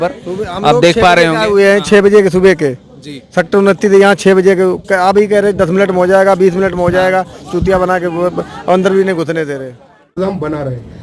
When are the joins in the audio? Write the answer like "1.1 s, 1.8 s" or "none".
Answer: 10.1 s